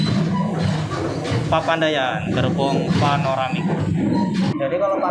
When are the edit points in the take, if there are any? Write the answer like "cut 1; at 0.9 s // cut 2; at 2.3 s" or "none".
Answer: none